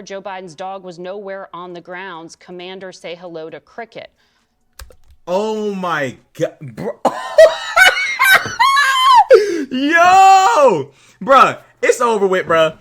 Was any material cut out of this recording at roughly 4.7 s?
no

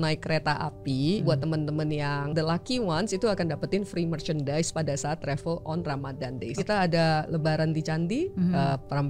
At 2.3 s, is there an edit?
yes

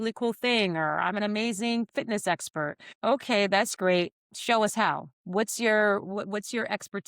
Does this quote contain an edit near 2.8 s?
yes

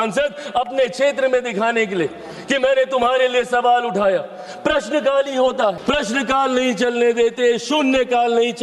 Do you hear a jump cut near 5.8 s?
yes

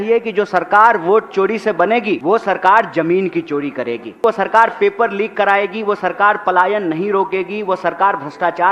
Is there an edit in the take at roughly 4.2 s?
yes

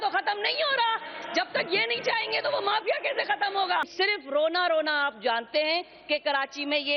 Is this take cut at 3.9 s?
yes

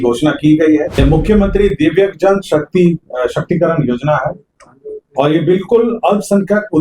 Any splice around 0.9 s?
yes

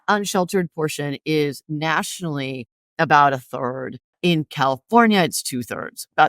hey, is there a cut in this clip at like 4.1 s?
yes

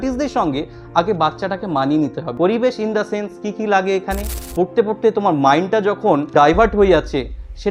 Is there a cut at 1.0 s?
no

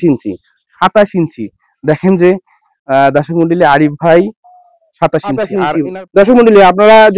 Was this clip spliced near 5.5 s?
yes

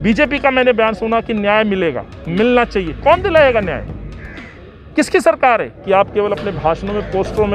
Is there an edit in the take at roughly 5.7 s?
yes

